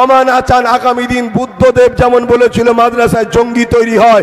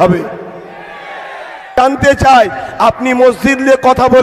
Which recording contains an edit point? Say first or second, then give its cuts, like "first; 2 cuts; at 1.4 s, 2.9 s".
second; 1 cut; at 1.7 s